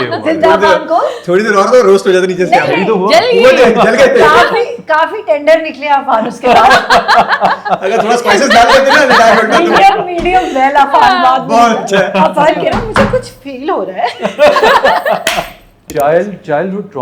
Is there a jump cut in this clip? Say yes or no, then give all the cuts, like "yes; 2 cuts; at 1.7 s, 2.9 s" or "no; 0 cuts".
yes; 1 cut; at 15.8 s